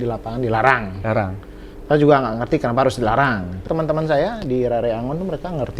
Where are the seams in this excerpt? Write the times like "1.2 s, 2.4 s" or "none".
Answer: 3.6 s